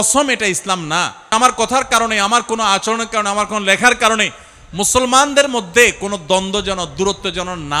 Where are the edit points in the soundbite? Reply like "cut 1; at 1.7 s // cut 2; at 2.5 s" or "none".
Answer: cut 1; at 1.2 s